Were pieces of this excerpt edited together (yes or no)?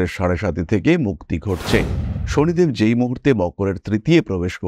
yes